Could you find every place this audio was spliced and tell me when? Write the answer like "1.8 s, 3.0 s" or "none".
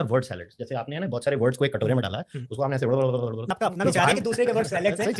3.5 s